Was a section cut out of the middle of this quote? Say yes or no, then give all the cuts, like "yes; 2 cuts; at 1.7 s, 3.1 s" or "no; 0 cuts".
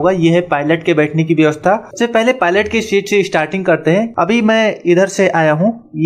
yes; 2 cuts; at 1.9 s, 4.1 s